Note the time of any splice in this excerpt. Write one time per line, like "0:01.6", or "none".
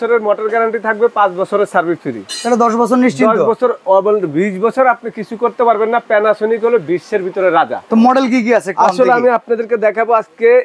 none